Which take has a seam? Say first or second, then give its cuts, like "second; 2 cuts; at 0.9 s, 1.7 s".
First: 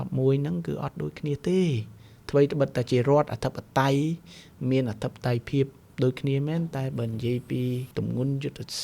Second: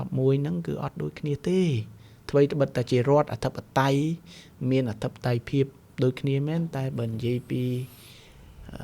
first; 1 cut; at 7.9 s